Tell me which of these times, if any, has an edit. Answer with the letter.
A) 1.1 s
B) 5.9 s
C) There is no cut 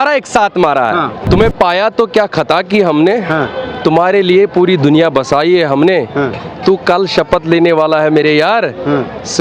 A